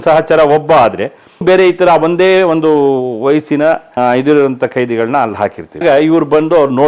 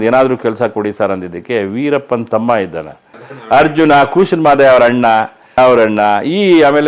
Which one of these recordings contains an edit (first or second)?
first